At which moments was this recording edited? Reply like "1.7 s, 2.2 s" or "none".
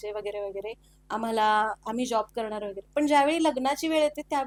none